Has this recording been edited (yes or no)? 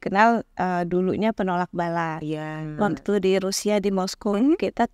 yes